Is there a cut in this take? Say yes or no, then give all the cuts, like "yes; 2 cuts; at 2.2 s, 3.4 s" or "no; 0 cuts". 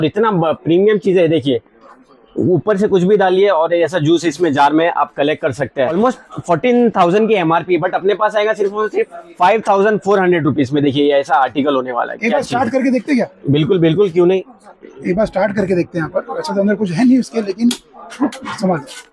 no; 0 cuts